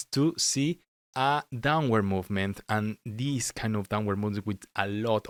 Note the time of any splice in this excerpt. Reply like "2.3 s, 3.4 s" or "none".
none